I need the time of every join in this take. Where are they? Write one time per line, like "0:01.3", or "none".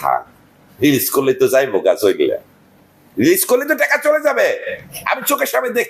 none